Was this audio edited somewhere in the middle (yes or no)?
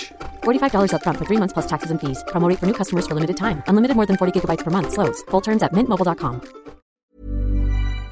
yes